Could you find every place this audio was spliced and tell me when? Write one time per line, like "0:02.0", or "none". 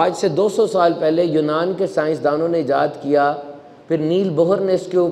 none